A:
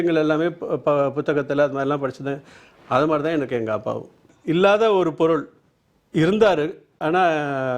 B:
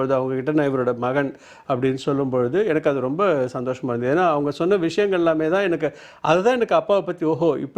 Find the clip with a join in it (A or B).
A